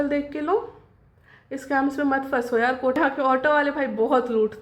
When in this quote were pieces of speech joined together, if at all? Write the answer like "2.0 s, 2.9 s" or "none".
3.0 s